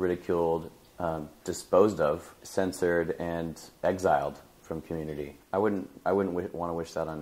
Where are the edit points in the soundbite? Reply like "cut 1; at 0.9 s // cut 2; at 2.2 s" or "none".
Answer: cut 1; at 5.4 s